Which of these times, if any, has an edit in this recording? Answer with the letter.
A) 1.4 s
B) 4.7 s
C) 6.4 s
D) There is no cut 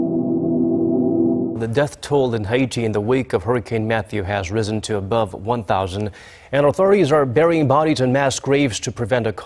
A